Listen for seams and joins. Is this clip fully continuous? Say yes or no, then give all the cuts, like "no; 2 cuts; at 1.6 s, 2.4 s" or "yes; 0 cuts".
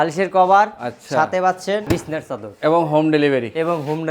no; 1 cut; at 1.8 s